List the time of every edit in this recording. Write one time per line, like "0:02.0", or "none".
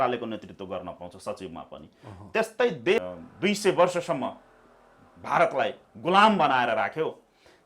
0:03.0